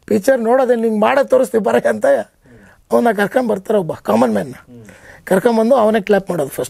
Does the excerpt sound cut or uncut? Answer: uncut